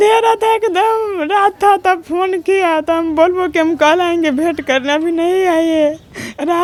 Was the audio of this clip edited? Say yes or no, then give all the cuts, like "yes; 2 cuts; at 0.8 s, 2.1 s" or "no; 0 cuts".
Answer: no; 0 cuts